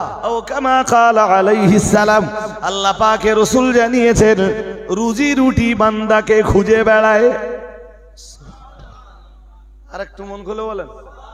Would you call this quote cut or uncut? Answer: uncut